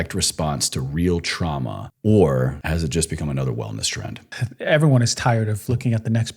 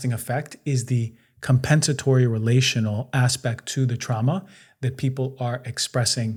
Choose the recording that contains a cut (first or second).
first